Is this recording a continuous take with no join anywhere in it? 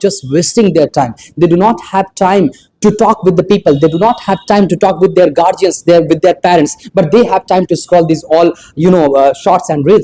yes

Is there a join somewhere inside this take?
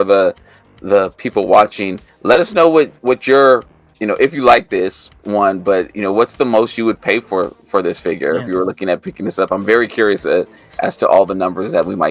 no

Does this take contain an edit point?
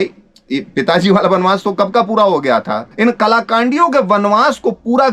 yes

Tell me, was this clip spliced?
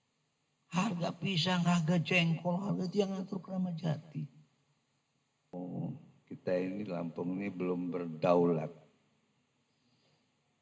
yes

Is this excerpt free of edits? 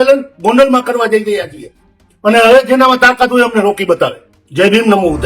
yes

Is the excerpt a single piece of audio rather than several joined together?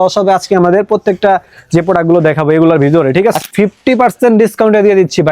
no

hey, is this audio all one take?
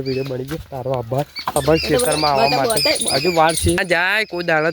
no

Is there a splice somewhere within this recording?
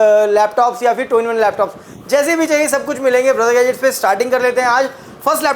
no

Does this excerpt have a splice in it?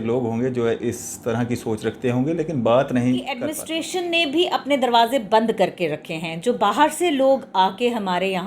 yes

